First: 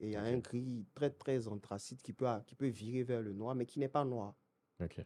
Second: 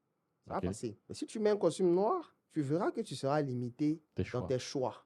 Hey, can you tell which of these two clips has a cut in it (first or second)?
second